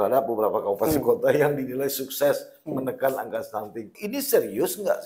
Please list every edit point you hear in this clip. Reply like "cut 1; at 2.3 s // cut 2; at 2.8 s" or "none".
cut 1; at 4.0 s